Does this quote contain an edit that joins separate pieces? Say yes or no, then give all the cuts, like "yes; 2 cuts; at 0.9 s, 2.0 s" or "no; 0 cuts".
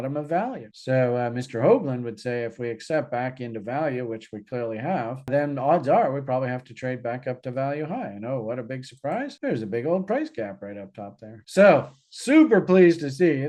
no; 0 cuts